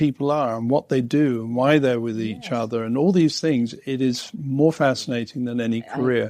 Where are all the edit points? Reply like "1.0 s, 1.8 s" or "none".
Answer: none